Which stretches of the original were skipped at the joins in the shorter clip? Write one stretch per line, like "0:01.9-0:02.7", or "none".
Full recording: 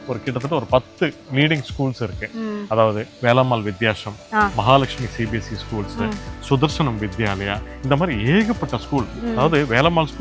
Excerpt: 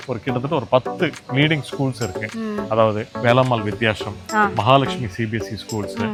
none